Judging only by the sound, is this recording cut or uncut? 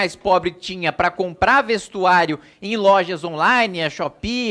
uncut